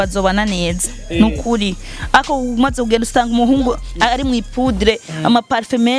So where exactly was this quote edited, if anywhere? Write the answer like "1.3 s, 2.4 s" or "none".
none

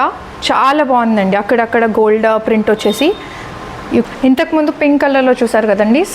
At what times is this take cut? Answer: 4.0 s

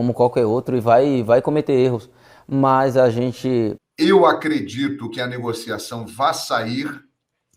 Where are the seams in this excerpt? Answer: 3.8 s

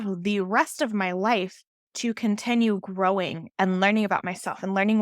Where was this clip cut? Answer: 3.4 s

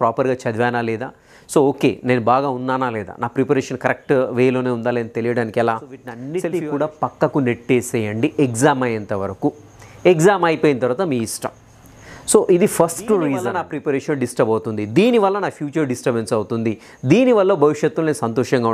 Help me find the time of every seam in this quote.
6.2 s, 13.6 s

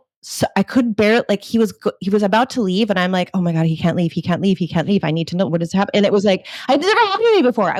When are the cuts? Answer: none

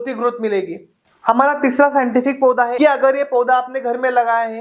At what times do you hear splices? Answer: 1.1 s, 2.7 s

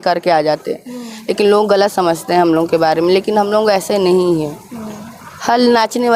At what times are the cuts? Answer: none

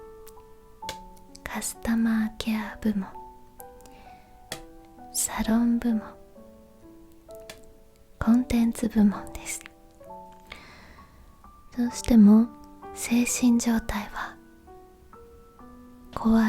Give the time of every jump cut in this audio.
10.3 s

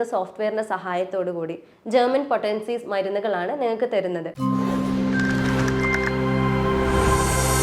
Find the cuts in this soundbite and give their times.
4.3 s

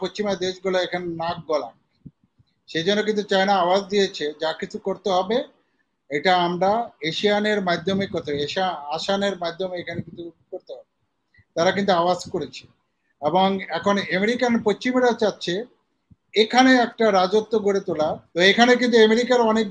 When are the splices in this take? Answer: 18.2 s

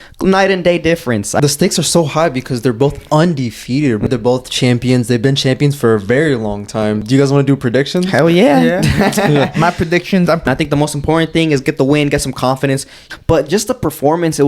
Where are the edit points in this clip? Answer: 1.4 s, 4.1 s, 7.0 s, 10.5 s, 12.9 s

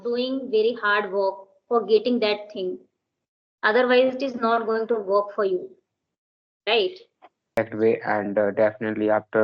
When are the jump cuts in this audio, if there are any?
7.6 s

